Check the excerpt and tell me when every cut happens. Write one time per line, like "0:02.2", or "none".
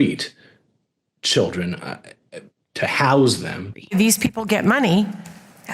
0:03.8